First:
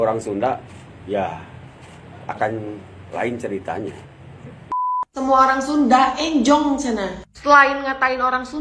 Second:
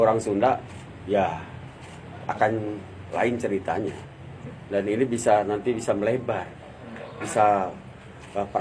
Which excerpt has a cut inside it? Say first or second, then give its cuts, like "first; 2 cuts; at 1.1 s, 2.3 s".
first; 1 cut; at 4.9 s